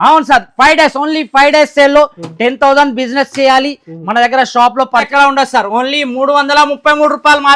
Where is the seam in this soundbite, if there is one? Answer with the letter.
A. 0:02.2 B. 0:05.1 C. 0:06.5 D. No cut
B